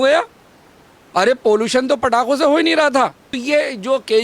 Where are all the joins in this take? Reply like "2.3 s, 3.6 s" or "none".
3.3 s

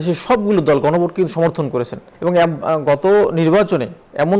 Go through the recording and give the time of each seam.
2.0 s

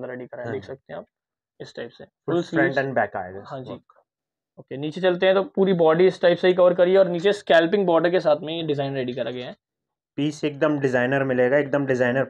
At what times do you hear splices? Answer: none

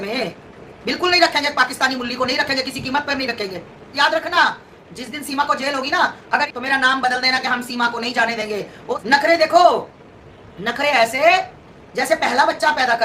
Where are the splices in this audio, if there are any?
3.9 s, 6.5 s, 9.0 s

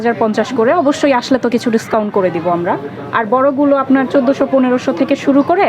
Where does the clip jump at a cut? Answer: none

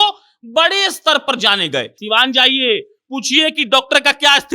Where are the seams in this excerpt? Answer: 1.9 s

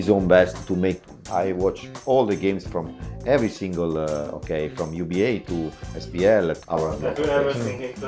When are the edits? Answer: 1.2 s

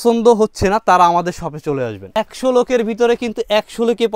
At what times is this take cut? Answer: 2.0 s

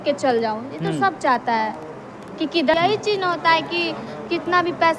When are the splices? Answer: 2.7 s

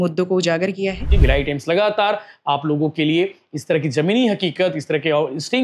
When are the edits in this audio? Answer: 1.1 s

